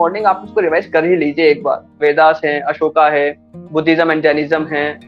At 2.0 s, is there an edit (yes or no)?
yes